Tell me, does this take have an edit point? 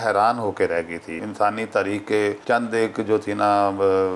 yes; 2 cuts; at 1.2 s, 2.4 s

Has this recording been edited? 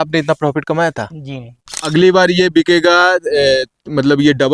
yes; 1 cut; at 1.9 s

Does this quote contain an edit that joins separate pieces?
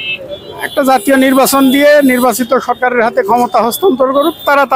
no; 0 cuts

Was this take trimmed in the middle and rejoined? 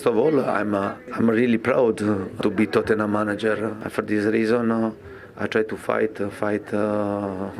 yes; 2 cuts; at 1.0 s, 3.8 s

